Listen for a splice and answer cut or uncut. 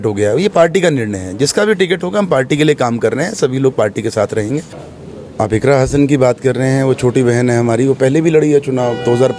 cut